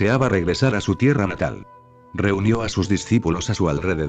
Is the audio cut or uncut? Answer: uncut